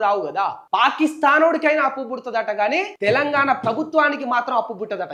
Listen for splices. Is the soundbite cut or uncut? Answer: uncut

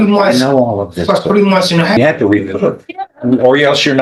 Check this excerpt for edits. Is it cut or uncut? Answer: cut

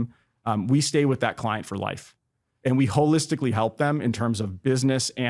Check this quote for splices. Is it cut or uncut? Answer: cut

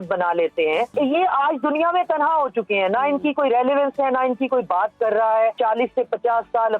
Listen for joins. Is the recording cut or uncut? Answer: cut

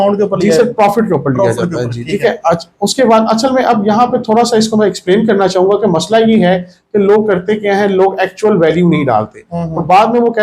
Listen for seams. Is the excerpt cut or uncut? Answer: uncut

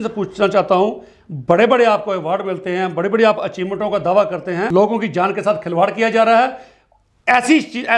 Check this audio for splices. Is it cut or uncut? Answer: cut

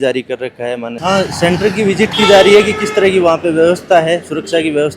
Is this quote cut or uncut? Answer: cut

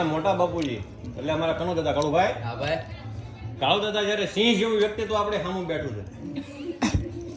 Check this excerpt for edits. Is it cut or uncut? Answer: uncut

